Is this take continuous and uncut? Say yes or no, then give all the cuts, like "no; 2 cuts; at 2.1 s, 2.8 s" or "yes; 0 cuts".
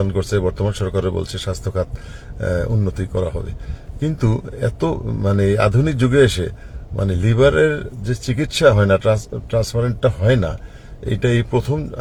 yes; 0 cuts